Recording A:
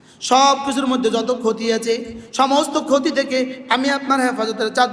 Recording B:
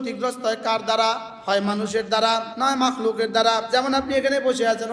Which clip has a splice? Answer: B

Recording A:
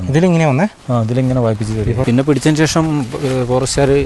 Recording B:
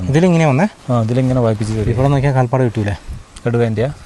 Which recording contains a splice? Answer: A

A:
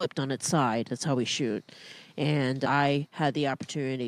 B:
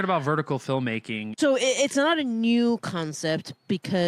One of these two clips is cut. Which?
B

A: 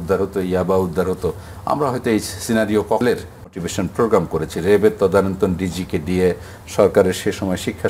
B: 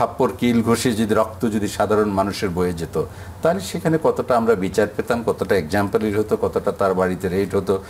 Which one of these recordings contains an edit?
A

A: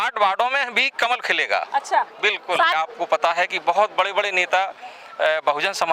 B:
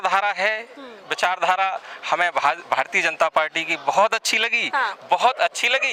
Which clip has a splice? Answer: A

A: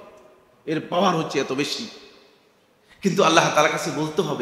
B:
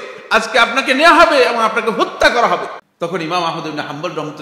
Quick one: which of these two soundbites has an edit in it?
B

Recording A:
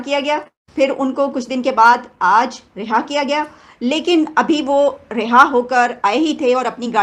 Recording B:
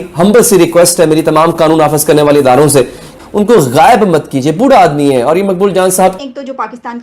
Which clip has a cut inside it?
B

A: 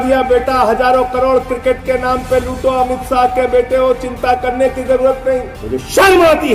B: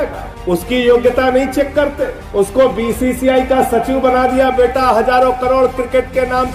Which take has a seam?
A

